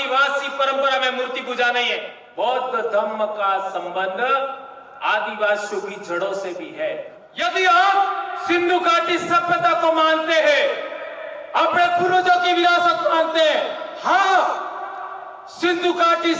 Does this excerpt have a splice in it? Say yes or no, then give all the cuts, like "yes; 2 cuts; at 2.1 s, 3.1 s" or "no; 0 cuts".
yes; 2 cuts; at 2.2 s, 7.2 s